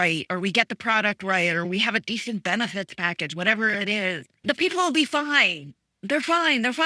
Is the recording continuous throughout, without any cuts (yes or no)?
no